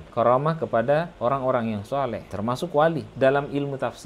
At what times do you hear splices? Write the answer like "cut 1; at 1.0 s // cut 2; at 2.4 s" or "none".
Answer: cut 1; at 3.1 s